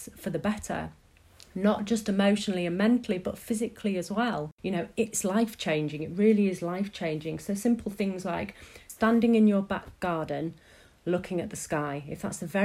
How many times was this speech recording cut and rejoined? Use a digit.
2